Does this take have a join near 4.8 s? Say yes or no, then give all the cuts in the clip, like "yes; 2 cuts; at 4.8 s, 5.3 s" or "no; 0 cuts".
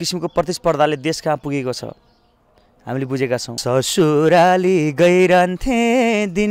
no; 1 cut; at 3.5 s